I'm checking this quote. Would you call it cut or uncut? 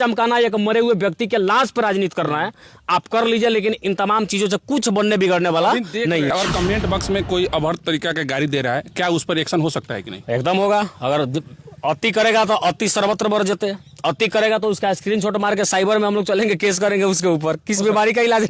cut